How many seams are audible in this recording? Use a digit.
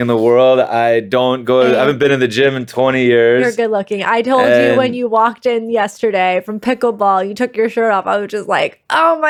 0